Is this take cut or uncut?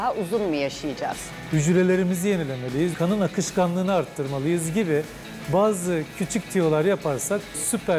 cut